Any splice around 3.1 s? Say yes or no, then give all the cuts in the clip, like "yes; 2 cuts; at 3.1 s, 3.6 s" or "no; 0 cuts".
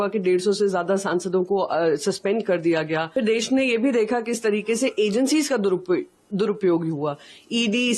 yes; 1 cut; at 3.1 s